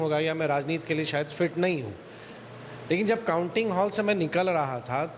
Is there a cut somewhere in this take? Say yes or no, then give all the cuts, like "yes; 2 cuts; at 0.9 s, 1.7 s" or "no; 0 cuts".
no; 0 cuts